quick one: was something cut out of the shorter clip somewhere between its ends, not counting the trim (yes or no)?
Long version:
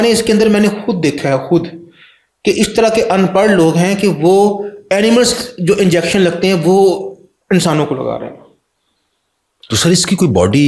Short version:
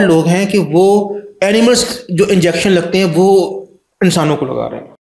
no